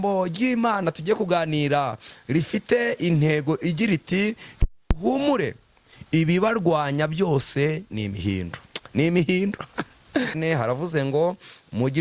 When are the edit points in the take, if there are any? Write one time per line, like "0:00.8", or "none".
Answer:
0:10.4